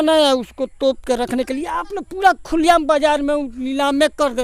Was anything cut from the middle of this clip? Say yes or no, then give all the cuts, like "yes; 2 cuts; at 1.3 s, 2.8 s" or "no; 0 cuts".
no; 0 cuts